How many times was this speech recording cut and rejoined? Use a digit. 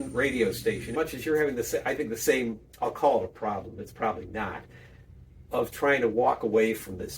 1